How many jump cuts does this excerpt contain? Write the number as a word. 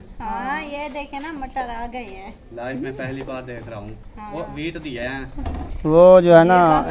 zero